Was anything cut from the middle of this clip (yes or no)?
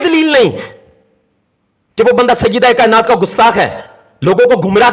no